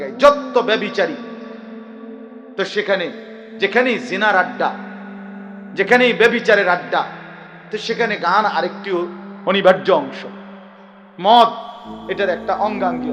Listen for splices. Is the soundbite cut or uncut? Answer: uncut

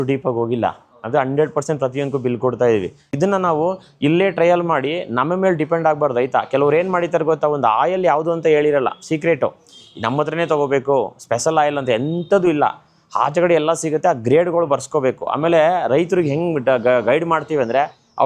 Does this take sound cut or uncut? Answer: cut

